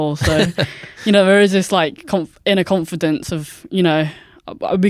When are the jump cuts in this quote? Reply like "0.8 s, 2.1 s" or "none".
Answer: none